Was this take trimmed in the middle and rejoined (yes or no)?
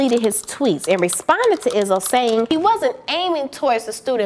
yes